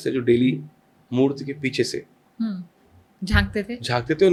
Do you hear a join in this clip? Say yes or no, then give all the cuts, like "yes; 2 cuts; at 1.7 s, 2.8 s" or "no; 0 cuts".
no; 0 cuts